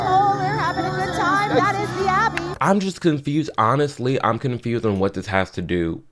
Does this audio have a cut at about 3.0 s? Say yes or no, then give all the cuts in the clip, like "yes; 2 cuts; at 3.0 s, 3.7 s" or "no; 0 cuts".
no; 0 cuts